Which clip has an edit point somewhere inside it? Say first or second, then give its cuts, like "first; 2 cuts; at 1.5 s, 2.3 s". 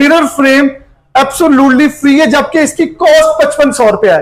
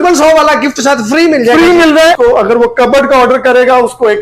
second; 1 cut; at 2.2 s